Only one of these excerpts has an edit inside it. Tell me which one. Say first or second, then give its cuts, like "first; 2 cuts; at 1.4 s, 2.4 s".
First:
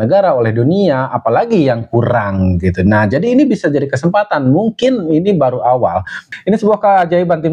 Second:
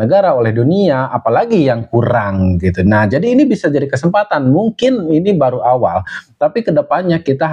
first; 1 cut; at 6.2 s